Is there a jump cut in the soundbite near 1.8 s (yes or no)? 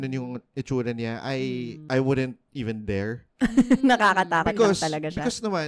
yes